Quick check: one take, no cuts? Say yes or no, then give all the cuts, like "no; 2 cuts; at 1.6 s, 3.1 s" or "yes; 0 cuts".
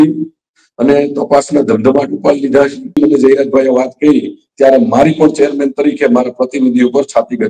no; 1 cut; at 3.0 s